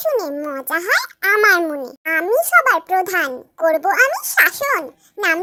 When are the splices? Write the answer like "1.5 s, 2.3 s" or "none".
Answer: none